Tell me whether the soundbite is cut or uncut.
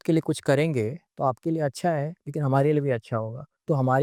uncut